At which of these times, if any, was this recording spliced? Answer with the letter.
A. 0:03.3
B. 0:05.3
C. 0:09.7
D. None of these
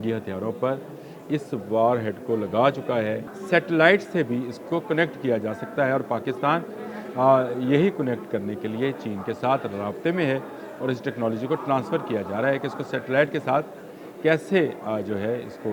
A